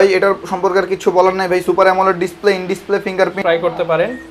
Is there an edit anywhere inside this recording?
yes; 1 cut; at 3.4 s

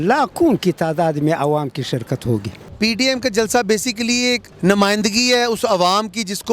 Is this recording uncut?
no; 2 cuts; at 2.6 s, 4.5 s

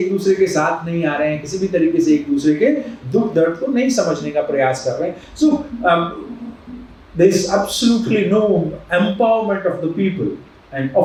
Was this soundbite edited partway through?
no; 0 cuts

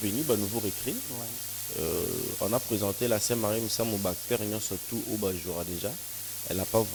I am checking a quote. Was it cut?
no; 0 cuts

